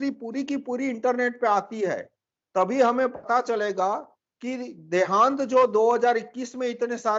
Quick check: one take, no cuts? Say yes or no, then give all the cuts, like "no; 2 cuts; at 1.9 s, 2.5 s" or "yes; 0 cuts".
yes; 0 cuts